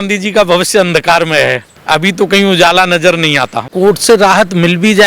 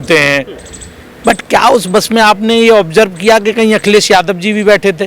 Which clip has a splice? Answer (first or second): first